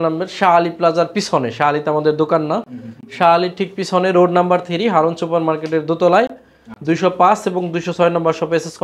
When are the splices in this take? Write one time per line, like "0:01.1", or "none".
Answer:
none